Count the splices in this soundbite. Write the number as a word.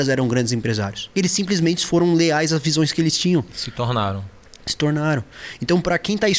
one